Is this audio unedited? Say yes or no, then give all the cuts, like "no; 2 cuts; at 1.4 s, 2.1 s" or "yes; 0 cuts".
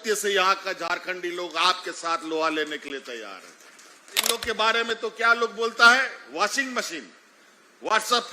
no; 1 cut; at 4.4 s